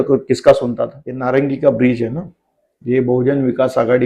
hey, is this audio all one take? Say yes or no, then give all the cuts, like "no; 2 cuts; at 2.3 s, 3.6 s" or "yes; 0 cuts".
no; 1 cut; at 1.1 s